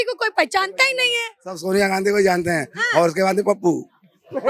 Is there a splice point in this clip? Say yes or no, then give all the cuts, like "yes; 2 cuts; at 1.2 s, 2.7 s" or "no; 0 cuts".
no; 0 cuts